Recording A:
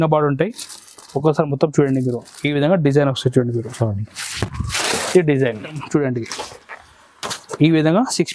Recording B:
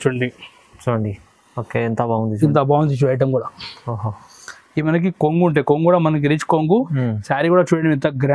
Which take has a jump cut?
A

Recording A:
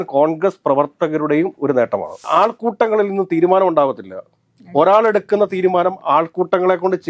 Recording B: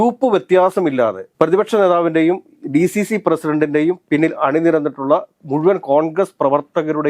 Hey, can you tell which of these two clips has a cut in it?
A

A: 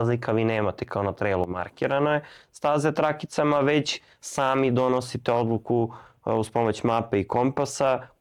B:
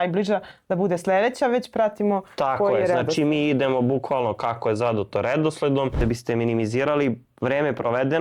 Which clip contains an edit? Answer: B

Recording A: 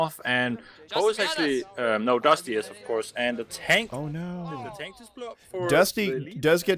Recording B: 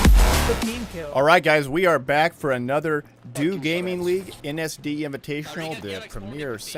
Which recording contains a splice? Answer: A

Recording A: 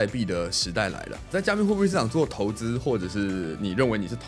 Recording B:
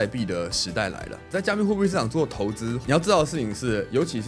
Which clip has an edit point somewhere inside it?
B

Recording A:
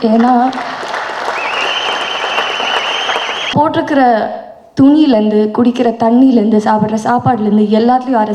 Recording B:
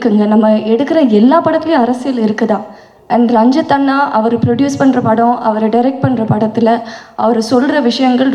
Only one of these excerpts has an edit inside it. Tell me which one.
A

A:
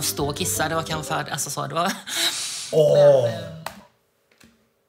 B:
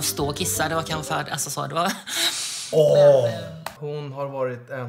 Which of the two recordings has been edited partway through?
B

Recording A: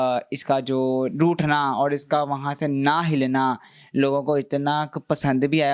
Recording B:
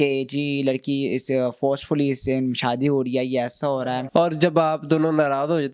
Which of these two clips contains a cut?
B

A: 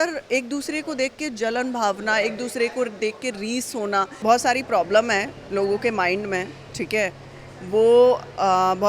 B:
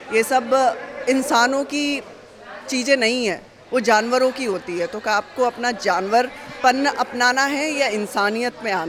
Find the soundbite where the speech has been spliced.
A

